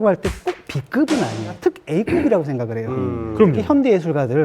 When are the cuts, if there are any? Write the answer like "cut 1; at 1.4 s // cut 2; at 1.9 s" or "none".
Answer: cut 1; at 1.5 s